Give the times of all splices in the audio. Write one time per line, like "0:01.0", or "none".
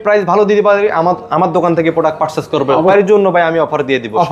0:02.9